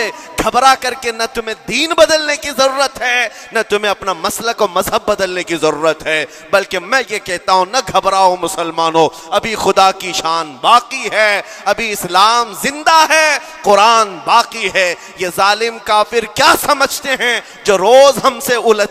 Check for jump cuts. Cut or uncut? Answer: uncut